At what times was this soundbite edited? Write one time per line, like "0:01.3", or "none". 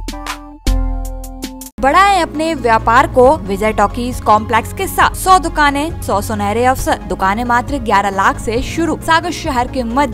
0:01.8
0:03.5
0:05.2
0:06.0
0:07.1
0:09.0